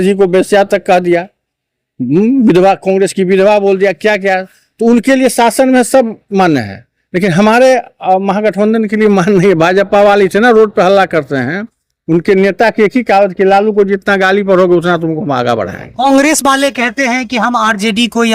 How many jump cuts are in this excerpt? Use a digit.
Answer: 0